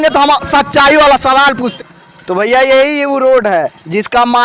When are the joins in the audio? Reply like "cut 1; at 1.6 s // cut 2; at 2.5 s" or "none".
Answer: cut 1; at 1.7 s